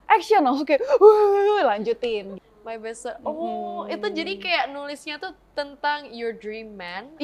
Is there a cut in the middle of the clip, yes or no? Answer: yes